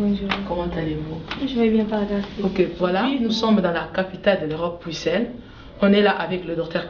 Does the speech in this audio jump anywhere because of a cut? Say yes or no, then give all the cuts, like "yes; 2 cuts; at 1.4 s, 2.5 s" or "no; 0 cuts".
yes; 1 cut; at 3.0 s